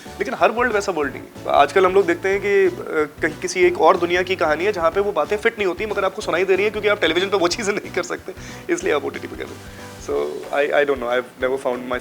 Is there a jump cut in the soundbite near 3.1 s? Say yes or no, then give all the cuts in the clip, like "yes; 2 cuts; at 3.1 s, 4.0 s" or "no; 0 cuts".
no; 1 cut; at 1.3 s